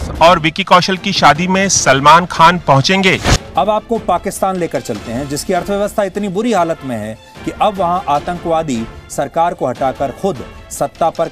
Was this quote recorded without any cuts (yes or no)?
no